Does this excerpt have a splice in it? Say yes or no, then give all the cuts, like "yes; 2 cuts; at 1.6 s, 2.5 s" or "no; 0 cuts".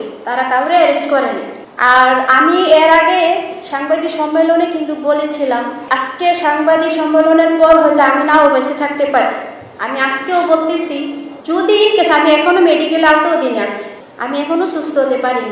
yes; 1 cut; at 5.8 s